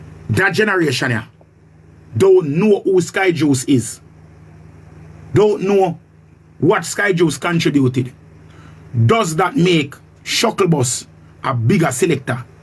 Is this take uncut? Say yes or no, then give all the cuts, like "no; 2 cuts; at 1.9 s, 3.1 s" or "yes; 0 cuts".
yes; 0 cuts